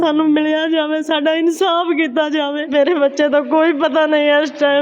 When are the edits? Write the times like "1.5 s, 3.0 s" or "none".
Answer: 2.7 s